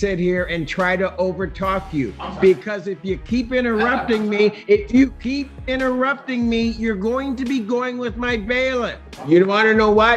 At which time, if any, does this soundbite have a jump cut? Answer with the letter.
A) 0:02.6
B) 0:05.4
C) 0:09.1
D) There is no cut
C